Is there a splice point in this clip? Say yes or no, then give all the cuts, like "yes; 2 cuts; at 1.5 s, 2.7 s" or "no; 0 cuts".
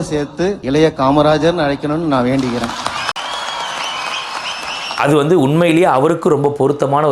yes; 1 cut; at 5.0 s